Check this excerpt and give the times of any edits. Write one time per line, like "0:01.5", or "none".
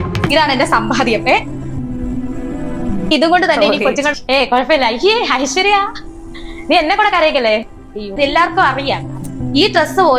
0:08.2